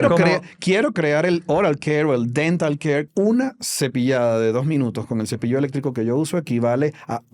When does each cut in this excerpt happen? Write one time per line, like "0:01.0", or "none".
0:03.1